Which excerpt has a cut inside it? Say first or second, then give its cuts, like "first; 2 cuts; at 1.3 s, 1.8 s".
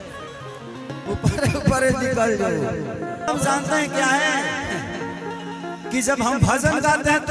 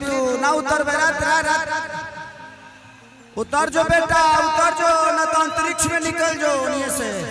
first; 1 cut; at 3.3 s